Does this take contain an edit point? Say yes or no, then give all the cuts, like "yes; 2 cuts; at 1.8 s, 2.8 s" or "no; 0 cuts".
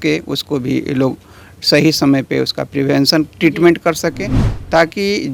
no; 0 cuts